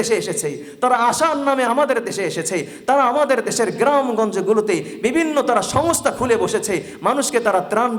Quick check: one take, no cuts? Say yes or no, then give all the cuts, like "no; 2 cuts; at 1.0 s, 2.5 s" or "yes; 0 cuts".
yes; 0 cuts